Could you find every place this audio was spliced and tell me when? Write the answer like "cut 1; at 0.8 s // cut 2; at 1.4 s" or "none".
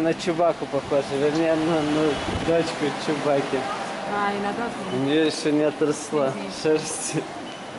none